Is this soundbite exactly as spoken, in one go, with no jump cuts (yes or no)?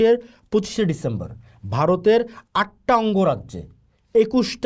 yes